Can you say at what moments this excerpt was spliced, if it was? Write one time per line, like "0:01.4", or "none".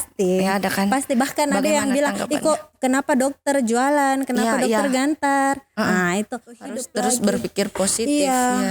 0:06.6